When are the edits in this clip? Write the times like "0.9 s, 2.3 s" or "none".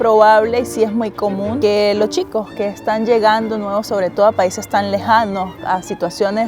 1.5 s